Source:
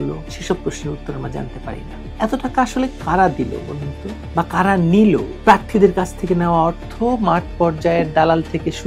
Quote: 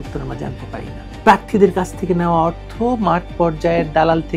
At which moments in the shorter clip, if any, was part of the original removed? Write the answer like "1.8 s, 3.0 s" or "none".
1.1 s